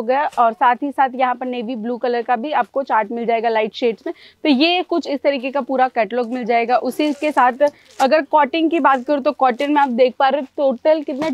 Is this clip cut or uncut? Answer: uncut